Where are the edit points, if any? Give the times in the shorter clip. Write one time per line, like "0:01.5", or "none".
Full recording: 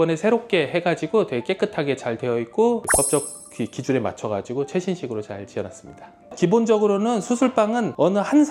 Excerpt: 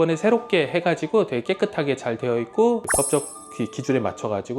none